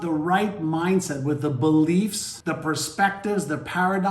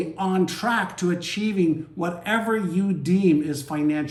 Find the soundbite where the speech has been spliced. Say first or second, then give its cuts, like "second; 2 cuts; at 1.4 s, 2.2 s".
first; 1 cut; at 2.3 s